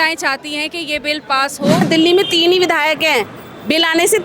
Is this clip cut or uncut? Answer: cut